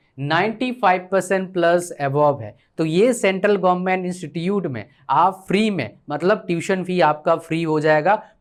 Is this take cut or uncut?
uncut